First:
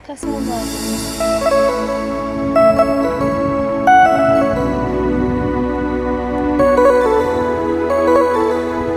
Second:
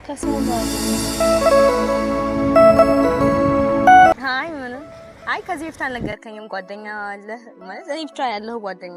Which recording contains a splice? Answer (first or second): second